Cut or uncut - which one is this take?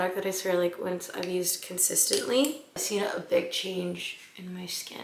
uncut